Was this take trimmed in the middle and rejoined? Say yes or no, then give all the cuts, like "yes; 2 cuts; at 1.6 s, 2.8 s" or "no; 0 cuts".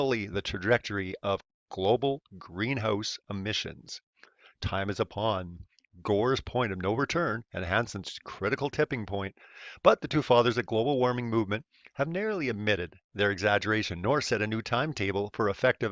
yes; 1 cut; at 8.9 s